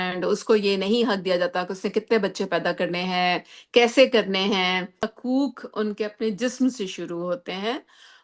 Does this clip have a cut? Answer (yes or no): yes